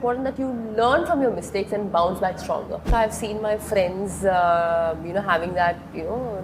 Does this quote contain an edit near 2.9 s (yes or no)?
yes